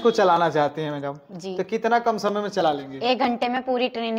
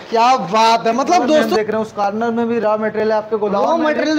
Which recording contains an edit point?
second; 1 cut; at 1.5 s

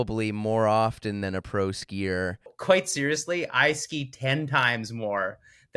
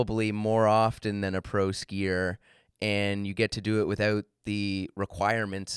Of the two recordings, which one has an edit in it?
first; 1 cut; at 2.5 s

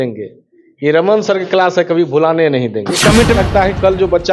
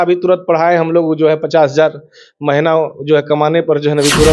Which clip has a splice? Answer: first; 1 cut; at 3.4 s

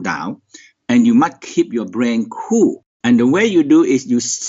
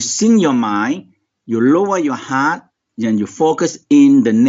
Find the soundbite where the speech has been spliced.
first; 1 cut; at 2.9 s

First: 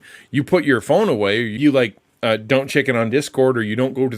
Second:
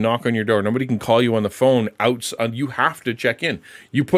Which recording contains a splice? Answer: first; 1 cut; at 1.5 s

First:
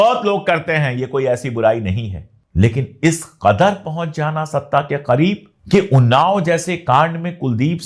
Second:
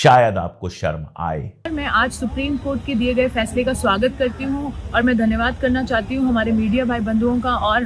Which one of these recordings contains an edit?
second; 1 cut; at 1.7 s

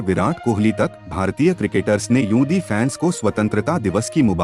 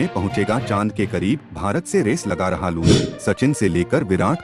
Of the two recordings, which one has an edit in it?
second; 1 cut; at 3.1 s

